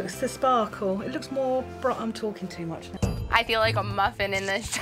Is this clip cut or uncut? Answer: cut